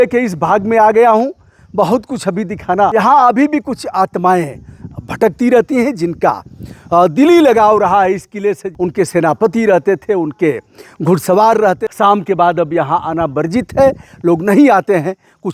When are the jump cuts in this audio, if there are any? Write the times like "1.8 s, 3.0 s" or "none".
2.9 s, 8.7 s, 11.8 s